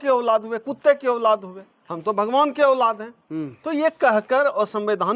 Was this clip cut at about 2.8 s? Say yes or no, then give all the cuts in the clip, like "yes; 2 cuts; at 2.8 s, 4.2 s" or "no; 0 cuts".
no; 0 cuts